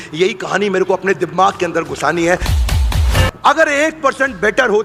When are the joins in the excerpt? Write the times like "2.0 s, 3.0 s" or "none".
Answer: 2.8 s